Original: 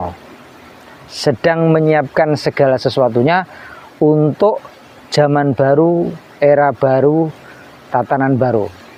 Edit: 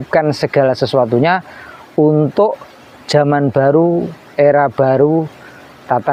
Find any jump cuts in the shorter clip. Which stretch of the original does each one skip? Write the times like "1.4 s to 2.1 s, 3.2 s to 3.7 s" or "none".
none